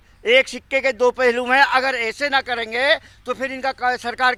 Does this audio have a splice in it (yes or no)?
no